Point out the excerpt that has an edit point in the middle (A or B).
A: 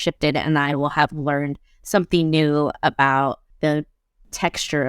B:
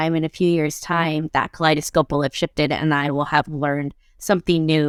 A